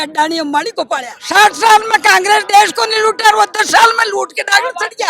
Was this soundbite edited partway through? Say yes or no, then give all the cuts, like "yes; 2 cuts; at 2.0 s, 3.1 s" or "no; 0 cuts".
yes; 1 cut; at 1.1 s